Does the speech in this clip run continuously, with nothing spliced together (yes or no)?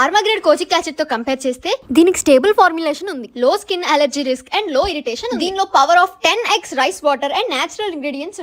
yes